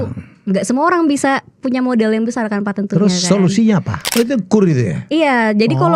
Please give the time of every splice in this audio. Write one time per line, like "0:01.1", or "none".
0:04.0